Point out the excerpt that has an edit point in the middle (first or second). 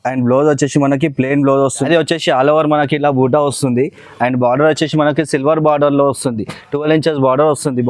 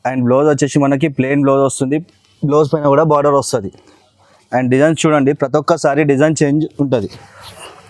first